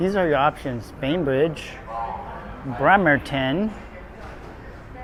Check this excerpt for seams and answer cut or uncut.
uncut